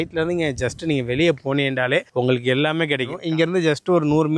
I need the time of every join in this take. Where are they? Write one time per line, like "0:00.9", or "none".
0:03.2